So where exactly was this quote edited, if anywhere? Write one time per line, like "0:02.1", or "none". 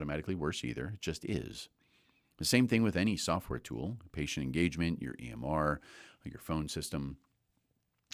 none